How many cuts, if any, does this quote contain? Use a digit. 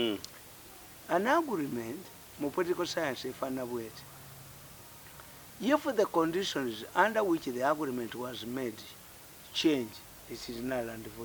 0